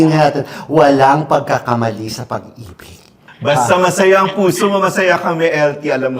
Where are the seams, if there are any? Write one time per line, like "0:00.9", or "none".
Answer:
0:03.2